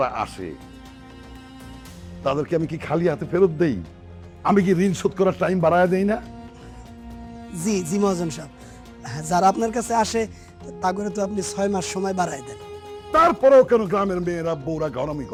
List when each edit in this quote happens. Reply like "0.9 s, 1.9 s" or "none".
none